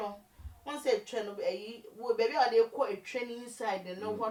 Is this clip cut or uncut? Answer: uncut